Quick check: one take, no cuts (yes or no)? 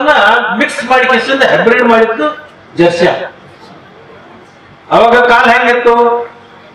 no